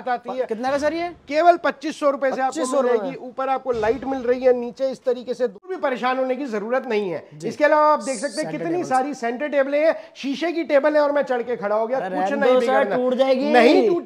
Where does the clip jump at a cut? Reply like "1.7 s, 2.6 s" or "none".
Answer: 5.6 s